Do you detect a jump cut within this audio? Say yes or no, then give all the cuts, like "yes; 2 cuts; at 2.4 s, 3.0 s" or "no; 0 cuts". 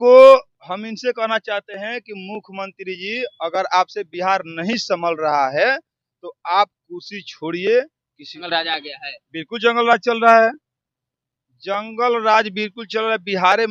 yes; 1 cut; at 8.5 s